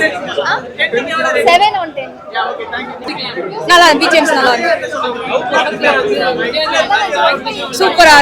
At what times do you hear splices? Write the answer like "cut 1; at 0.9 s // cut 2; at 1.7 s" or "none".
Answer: cut 1; at 3.0 s